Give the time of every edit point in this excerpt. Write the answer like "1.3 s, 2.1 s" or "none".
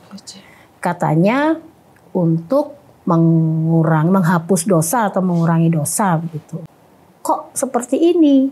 6.5 s